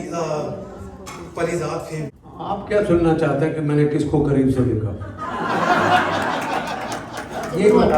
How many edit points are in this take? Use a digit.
1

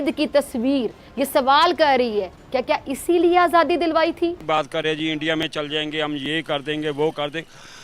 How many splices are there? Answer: 1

